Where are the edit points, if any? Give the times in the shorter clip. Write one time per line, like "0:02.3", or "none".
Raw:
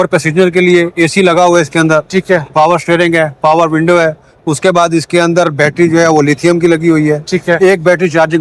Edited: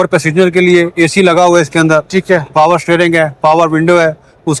none